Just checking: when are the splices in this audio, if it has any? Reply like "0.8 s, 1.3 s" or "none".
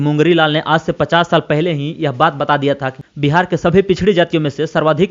none